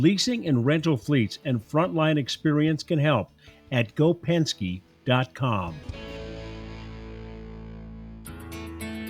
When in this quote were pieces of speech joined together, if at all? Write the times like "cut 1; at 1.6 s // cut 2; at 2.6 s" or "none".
cut 1; at 8.2 s